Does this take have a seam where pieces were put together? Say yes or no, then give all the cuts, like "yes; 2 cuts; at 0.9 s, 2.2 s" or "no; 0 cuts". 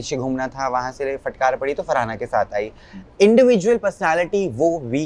no; 0 cuts